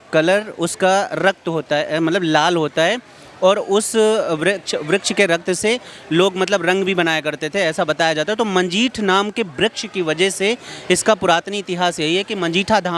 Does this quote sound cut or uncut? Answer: uncut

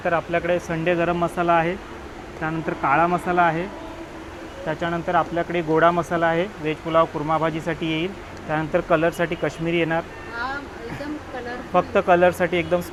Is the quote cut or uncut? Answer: uncut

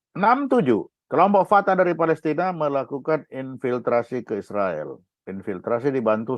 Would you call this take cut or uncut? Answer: cut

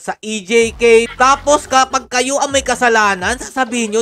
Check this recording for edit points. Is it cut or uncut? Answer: cut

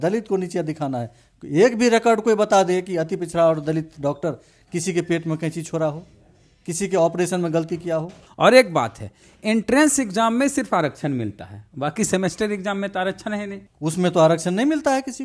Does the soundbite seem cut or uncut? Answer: cut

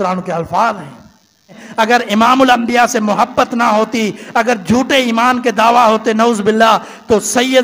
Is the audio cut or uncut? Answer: cut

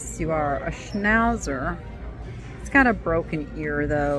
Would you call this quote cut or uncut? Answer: uncut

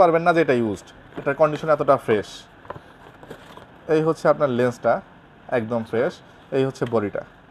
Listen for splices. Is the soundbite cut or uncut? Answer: uncut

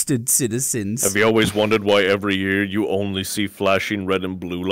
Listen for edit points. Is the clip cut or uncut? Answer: cut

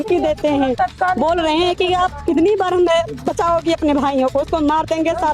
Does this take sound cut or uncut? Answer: uncut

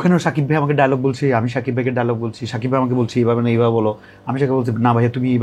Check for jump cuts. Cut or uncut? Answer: uncut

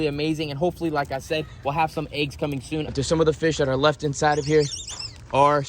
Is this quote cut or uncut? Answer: cut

